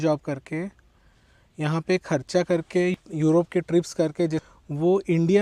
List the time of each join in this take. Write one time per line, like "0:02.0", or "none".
0:02.9
0:04.4